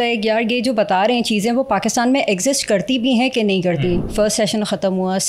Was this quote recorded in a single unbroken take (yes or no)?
no